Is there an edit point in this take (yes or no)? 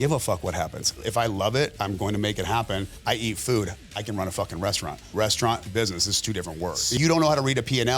yes